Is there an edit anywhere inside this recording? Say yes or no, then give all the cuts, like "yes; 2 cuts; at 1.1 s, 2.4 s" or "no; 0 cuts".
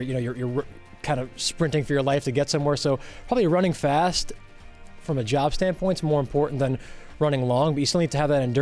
no; 0 cuts